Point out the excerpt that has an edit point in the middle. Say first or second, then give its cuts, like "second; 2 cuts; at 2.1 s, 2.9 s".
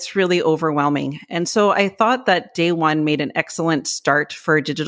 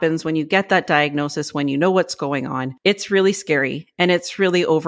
second; 1 cut; at 2.6 s